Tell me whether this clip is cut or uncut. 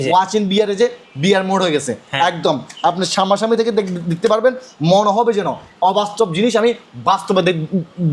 uncut